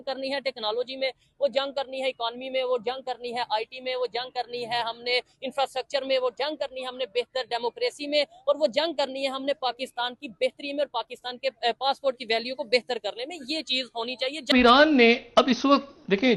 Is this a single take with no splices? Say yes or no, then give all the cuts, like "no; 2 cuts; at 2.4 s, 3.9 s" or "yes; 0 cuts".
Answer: no; 1 cut; at 14.5 s